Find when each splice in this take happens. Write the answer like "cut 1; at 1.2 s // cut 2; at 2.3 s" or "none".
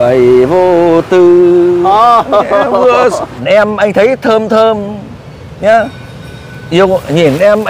cut 1; at 3.4 s